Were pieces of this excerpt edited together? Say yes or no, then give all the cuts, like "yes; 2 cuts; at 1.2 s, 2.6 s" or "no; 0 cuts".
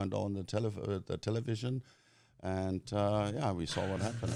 no; 0 cuts